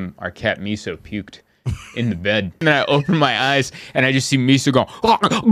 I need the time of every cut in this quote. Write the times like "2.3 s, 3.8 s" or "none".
2.6 s